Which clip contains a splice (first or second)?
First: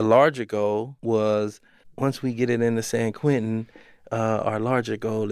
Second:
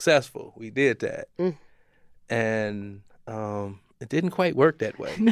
first